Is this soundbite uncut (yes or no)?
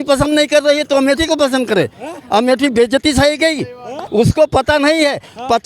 no